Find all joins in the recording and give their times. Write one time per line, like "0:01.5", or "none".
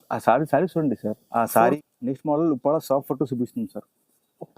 0:01.6